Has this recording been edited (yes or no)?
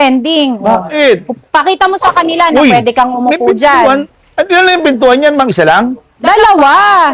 no